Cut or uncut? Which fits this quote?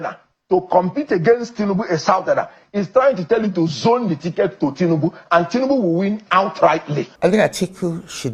cut